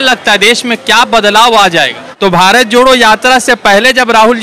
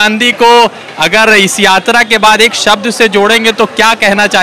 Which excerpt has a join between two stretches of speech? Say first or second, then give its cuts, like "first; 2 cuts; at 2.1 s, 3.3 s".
first; 1 cut; at 2.1 s